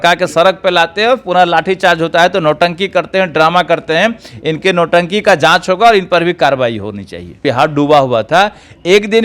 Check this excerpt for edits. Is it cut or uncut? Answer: cut